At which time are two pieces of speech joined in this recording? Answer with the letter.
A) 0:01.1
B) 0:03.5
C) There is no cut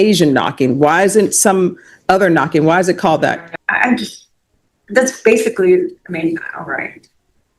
B